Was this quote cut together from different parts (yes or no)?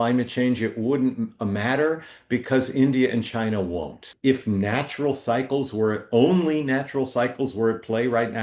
yes